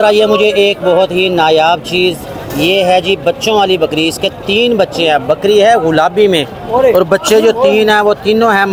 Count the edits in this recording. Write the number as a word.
zero